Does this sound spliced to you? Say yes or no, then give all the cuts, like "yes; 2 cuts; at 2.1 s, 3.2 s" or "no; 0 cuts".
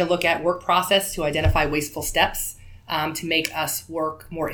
no; 0 cuts